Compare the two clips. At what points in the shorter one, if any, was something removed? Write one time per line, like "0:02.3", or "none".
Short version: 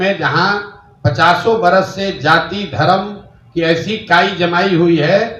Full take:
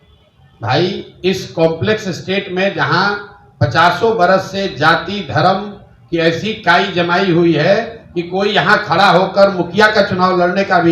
none